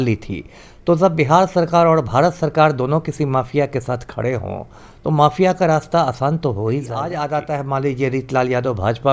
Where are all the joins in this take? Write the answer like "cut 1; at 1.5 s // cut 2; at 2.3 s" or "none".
cut 1; at 7.1 s